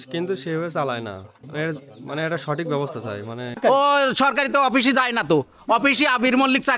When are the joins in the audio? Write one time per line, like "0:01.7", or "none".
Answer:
0:03.5